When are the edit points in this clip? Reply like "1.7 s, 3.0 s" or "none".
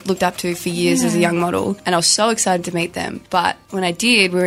1.8 s, 3.2 s